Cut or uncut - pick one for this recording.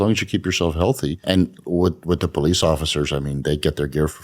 cut